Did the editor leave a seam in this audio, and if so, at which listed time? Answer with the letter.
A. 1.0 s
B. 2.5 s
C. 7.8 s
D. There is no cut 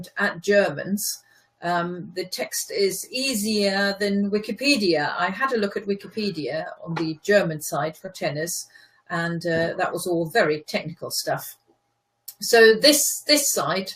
D